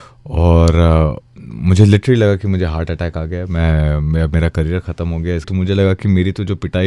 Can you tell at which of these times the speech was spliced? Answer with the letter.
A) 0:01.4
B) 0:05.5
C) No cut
B